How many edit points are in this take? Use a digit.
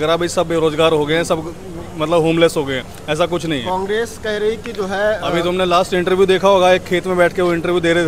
0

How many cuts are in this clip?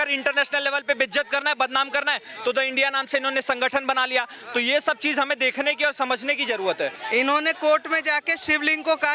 1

